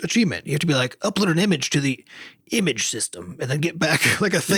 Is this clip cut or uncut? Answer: uncut